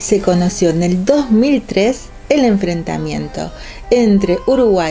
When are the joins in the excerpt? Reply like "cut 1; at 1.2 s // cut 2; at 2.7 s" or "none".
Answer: none

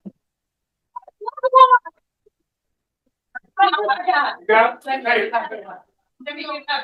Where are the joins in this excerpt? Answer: none

